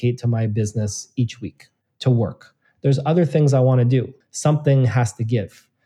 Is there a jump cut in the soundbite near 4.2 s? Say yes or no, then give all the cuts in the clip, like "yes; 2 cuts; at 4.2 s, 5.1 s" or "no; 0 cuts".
yes; 1 cut; at 4.2 s